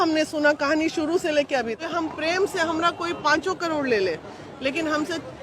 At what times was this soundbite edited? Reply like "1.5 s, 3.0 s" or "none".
1.8 s